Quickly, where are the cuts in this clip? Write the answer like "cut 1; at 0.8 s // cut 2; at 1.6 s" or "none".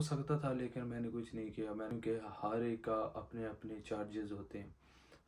cut 1; at 1.9 s